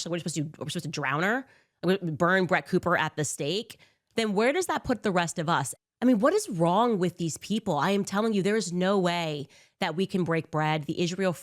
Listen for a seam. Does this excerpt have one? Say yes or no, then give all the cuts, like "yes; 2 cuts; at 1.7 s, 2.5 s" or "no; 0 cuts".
yes; 1 cut; at 5.7 s